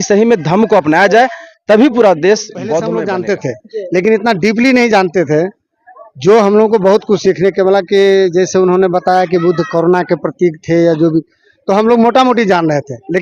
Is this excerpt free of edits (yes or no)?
no